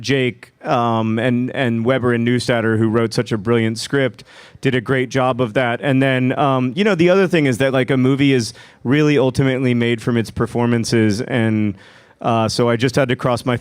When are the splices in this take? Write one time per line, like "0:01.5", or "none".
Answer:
0:05.7